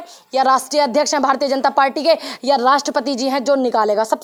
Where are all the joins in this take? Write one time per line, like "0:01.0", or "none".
none